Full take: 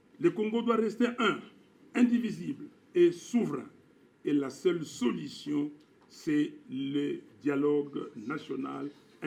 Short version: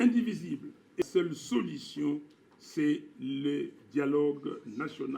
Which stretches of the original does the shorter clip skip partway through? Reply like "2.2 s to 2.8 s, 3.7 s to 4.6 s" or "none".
3.0 s to 4.5 s